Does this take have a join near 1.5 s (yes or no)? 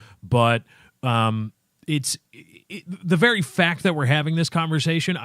yes